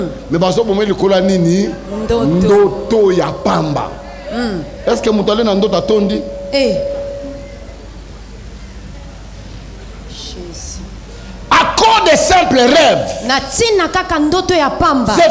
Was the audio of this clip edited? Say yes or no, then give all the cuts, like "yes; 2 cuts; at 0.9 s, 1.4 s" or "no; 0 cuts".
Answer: no; 0 cuts